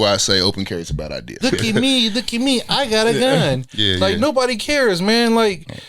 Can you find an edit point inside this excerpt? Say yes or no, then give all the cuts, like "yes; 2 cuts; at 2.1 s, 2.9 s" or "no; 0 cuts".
yes; 1 cut; at 1.4 s